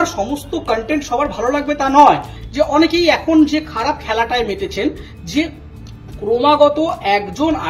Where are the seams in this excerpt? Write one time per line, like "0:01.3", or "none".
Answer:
0:02.4